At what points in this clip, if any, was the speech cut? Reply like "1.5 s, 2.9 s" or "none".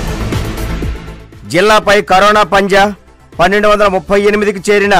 1.0 s